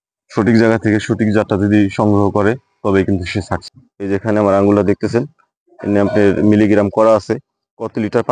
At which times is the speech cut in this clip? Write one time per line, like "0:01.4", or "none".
0:03.7